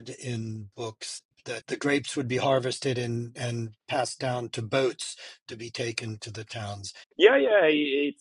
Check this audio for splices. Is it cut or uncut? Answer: cut